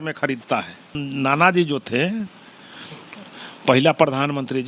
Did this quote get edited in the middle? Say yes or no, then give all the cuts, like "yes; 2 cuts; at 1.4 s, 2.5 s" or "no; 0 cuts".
yes; 1 cut; at 1.0 s